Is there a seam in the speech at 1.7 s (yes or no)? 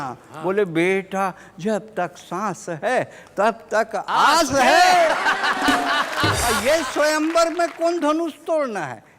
no